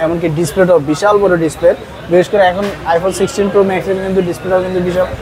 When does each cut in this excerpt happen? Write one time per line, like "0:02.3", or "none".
none